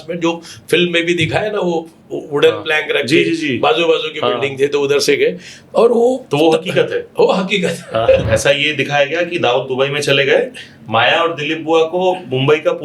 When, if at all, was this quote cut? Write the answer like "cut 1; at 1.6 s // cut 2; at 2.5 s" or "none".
cut 1; at 8.2 s